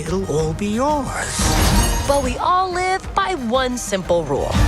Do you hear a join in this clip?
yes; 1 cut; at 2.0 s

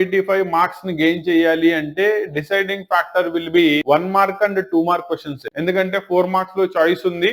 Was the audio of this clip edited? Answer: no; 0 cuts

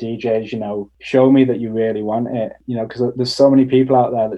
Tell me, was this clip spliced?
yes; 2 cuts; at 0.9 s, 2.6 s

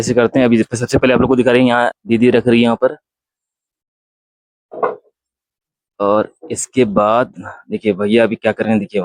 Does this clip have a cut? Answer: yes; 1 cut; at 2.0 s

